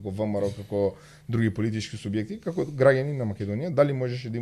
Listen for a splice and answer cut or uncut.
uncut